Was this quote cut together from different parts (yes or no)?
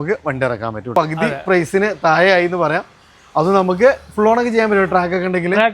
yes